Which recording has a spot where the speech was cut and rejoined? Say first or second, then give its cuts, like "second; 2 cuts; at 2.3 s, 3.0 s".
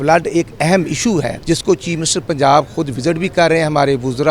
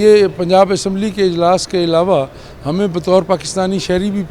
first; 1 cut; at 1.4 s